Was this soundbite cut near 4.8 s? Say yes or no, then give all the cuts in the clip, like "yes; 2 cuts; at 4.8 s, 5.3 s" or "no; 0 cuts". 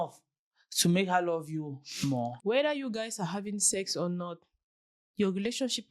no; 1 cut; at 2.4 s